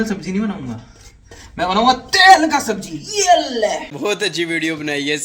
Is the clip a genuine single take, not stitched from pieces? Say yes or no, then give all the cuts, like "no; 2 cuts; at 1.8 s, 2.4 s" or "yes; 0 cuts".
no; 1 cut; at 3.9 s